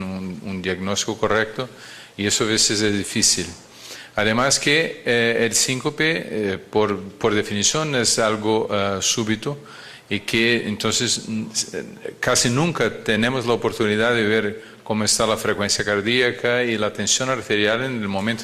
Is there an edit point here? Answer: yes; 1 cut; at 6.0 s

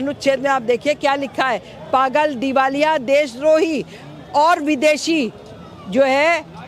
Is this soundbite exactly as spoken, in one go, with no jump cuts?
yes; 0 cuts

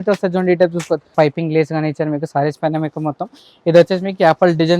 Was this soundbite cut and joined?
yes; 1 cut; at 1.1 s

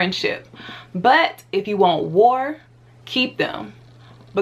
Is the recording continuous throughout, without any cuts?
yes; 0 cuts

